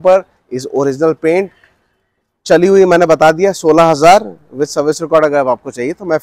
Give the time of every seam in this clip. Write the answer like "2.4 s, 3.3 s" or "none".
none